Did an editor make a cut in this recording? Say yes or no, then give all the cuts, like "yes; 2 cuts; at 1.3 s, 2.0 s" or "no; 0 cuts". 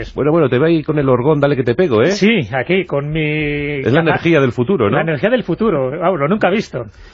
yes; 1 cut; at 3.2 s